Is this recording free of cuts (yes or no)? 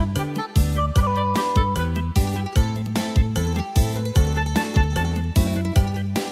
yes